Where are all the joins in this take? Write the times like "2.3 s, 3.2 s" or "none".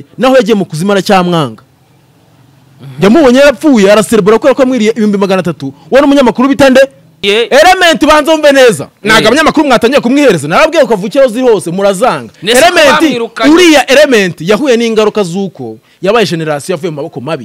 7.1 s